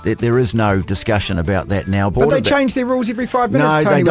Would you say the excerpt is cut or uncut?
cut